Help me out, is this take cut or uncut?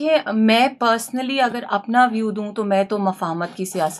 uncut